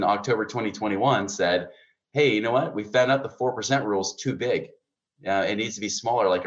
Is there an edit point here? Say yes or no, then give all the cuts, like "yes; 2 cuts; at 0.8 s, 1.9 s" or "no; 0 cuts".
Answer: no; 0 cuts